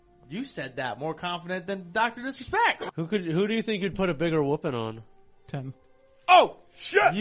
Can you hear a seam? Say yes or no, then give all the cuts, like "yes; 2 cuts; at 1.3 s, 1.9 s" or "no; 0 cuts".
yes; 1 cut; at 2.9 s